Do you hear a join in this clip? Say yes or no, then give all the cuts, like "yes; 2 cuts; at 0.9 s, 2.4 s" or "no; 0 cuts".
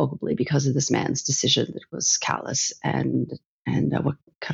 no; 0 cuts